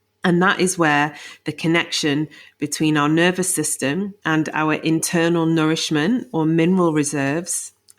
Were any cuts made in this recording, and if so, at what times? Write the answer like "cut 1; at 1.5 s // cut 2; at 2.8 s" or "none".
cut 1; at 4.2 s